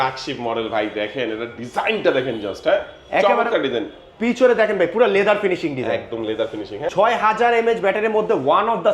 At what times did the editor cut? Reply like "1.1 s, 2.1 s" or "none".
6.9 s